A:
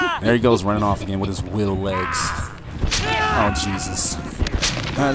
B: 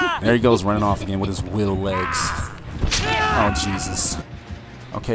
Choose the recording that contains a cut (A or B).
B